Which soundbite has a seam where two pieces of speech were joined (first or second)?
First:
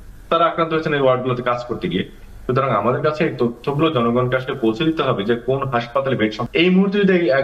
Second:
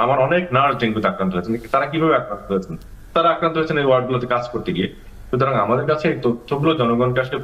first